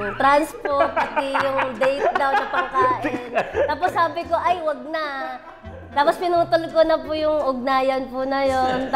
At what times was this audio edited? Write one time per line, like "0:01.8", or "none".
none

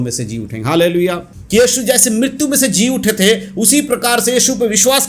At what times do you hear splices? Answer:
0:01.3

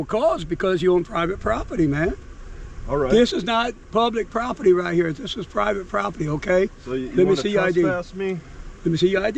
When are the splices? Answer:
none

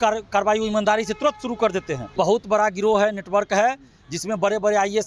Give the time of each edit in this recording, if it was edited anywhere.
0:02.1

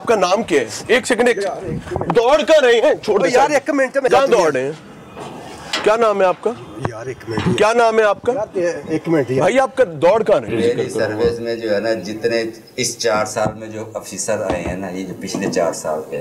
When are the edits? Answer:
0:10.5

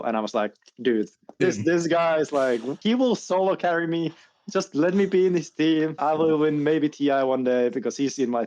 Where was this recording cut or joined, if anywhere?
0:01.3
0:02.7
0:06.0

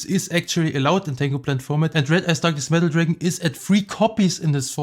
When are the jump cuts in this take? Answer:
0:01.9

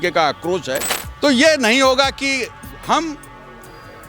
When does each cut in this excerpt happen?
0:01.0

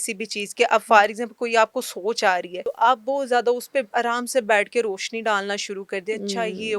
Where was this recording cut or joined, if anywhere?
0:02.6

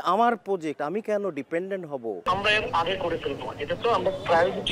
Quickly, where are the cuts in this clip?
0:02.2

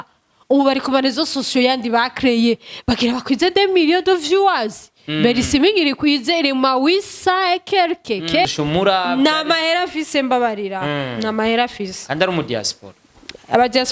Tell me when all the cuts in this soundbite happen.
0:08.4

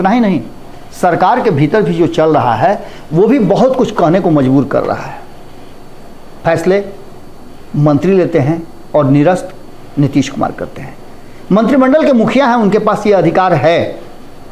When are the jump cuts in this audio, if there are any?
none

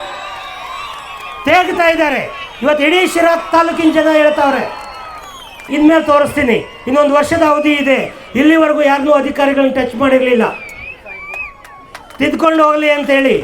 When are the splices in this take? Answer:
0:05.6

